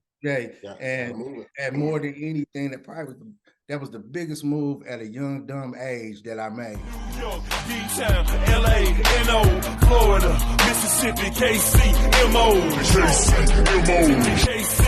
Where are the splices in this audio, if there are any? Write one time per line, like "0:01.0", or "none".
0:06.9